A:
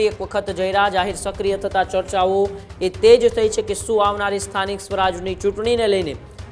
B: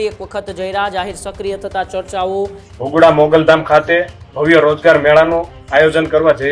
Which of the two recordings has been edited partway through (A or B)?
B